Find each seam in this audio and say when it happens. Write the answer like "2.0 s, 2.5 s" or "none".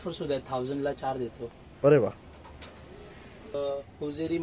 3.5 s